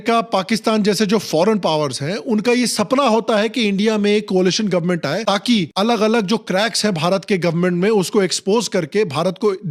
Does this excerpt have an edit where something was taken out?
no; 0 cuts

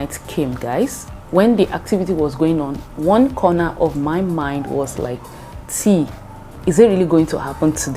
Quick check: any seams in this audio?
yes; 1 cut; at 1.1 s

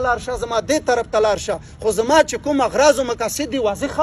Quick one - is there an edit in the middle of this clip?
no; 0 cuts

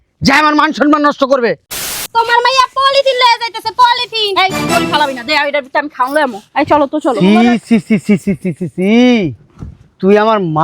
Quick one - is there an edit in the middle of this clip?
yes; 1 cut; at 1.9 s

